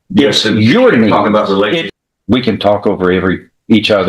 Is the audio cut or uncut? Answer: cut